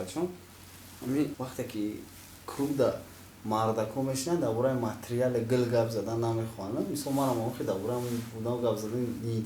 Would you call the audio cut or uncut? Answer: cut